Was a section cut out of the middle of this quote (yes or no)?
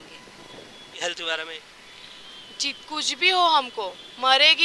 yes